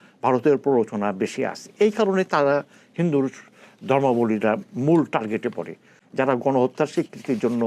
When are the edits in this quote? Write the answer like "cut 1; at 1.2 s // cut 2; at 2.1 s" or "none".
cut 1; at 6.0 s